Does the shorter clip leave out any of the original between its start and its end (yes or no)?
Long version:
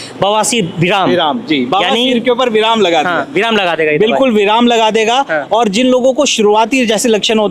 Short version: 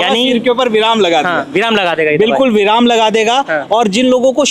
no